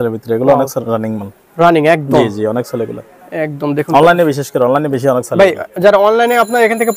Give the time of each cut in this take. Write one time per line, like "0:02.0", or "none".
none